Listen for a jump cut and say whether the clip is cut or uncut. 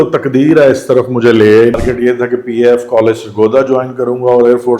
cut